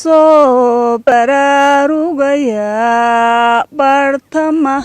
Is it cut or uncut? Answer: cut